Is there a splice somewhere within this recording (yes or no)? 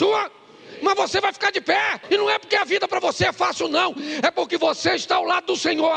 yes